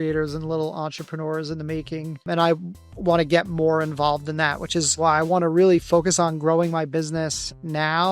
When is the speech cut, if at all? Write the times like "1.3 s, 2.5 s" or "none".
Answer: 2.3 s, 5.0 s

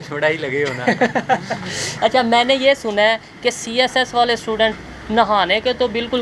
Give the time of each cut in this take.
1.9 s

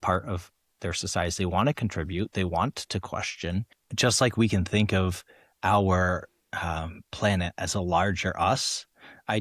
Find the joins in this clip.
3.8 s

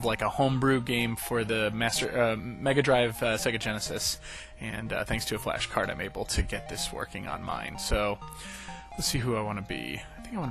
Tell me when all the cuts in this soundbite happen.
1.6 s

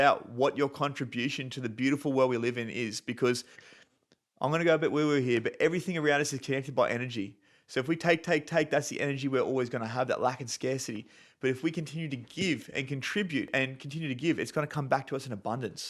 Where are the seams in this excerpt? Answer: 13.5 s

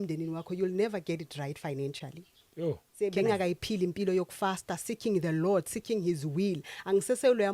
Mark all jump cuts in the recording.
2.9 s

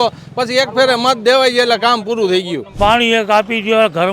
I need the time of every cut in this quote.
2.8 s

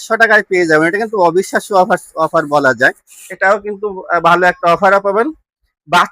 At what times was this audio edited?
3.2 s

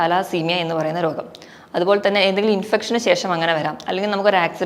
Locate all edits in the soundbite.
none

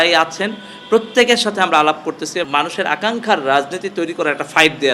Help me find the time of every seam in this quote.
2.5 s

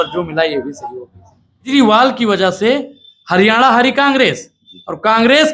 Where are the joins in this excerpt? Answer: 1.7 s

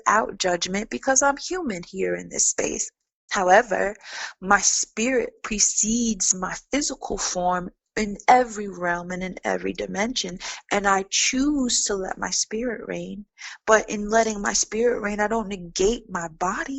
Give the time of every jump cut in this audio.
3.3 s

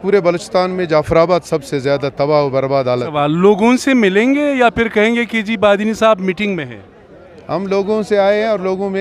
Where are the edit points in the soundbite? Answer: 3.2 s

